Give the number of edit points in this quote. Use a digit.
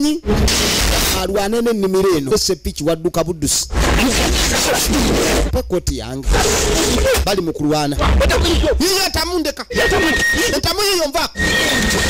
1